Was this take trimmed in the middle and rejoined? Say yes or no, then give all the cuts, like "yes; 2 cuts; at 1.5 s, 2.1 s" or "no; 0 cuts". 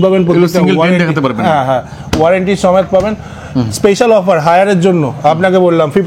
no; 0 cuts